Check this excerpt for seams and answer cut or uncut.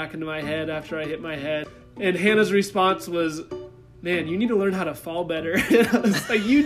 cut